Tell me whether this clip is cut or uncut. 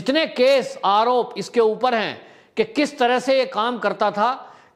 uncut